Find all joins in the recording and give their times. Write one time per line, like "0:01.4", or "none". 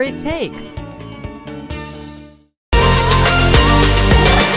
0:02.5

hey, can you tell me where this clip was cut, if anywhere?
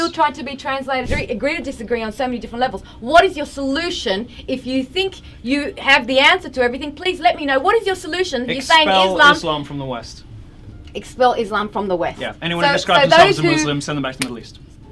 0:01.1

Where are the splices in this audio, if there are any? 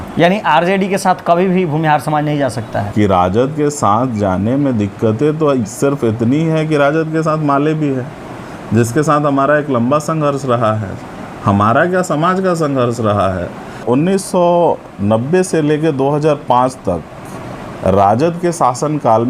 0:02.9
0:13.8

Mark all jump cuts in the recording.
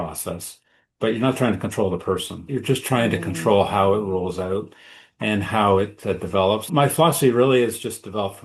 0:02.4
0:06.7

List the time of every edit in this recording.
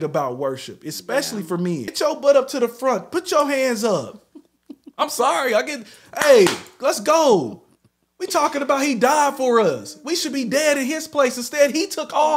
0:01.9

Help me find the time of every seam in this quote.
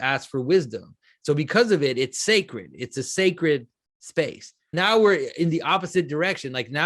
0:04.6

